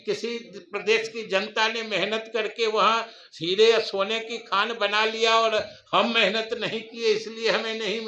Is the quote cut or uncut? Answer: uncut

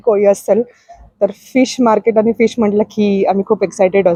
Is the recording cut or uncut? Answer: uncut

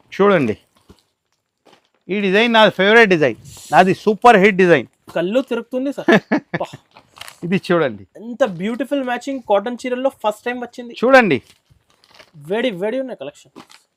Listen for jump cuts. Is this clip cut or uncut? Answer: uncut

